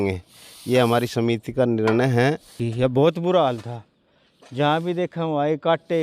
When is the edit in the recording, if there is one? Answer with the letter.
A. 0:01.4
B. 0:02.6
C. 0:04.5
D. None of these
B